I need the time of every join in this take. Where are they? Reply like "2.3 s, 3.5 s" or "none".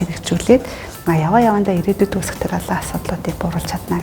none